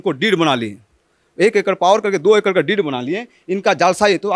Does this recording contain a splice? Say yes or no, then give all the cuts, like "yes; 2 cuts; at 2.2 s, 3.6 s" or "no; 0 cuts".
no; 0 cuts